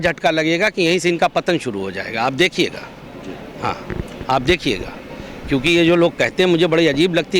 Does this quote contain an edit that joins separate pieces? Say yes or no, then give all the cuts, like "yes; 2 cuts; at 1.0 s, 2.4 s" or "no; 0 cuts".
no; 0 cuts